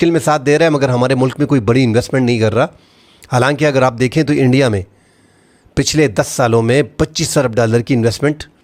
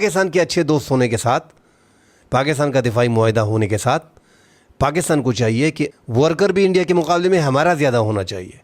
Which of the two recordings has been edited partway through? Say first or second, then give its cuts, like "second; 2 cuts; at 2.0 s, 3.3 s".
second; 1 cut; at 5.9 s